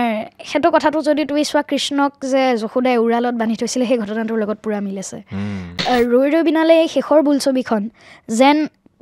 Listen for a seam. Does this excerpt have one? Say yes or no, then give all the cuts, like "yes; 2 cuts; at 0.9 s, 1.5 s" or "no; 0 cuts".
yes; 1 cut; at 5.8 s